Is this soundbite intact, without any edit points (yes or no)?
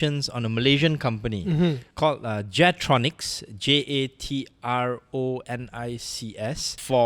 yes